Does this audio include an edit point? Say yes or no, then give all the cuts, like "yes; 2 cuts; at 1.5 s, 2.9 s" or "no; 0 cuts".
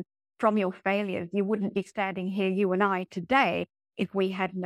no; 0 cuts